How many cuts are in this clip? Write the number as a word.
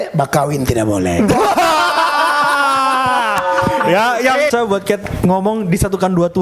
one